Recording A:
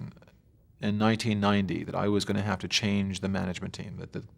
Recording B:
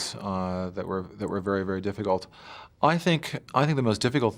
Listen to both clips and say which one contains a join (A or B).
A